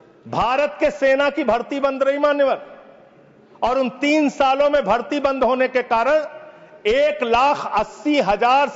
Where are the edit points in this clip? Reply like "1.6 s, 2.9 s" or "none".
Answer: none